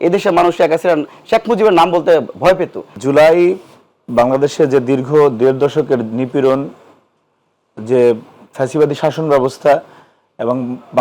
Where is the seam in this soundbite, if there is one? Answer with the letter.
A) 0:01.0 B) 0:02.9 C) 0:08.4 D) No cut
B